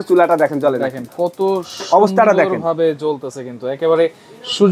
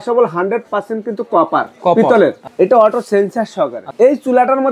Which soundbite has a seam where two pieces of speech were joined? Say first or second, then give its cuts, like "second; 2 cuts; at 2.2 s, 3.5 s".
second; 2 cuts; at 2.4 s, 3.8 s